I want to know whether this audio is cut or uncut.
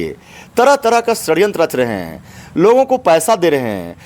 uncut